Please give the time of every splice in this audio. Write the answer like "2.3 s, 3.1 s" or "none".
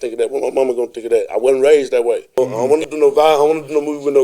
2.6 s